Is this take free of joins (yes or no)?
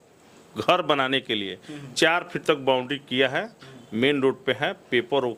yes